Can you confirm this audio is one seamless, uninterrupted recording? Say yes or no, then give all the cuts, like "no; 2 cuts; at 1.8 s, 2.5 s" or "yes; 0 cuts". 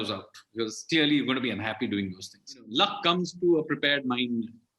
no; 1 cut; at 2.7 s